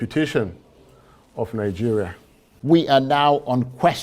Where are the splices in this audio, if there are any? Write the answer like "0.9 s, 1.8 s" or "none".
2.5 s